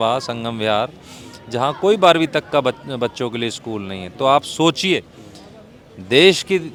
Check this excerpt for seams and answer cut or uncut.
uncut